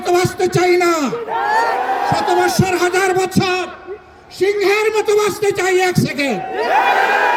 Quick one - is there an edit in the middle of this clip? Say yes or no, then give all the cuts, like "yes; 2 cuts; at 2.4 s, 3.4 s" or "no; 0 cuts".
no; 0 cuts